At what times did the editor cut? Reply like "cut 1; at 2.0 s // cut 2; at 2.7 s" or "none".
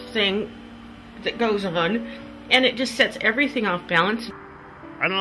none